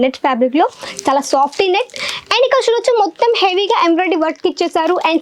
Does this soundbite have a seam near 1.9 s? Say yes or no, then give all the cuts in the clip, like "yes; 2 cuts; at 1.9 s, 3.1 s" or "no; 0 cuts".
no; 0 cuts